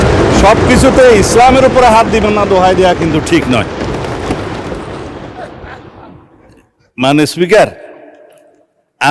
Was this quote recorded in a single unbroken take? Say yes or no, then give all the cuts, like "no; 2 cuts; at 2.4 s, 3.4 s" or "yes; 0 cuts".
yes; 0 cuts